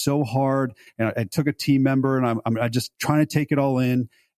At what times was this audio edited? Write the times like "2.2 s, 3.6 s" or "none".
none